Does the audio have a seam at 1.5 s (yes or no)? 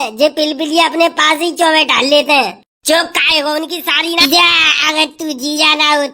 no